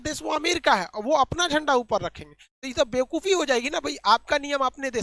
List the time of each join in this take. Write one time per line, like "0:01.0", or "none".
none